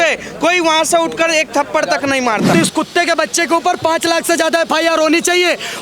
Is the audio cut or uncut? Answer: cut